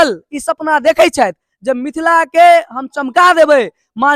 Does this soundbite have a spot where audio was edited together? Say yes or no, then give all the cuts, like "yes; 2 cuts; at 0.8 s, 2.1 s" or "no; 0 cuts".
no; 0 cuts